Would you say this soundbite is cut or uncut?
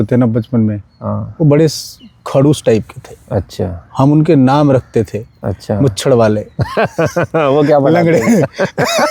uncut